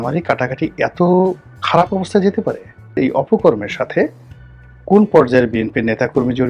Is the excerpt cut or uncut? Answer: cut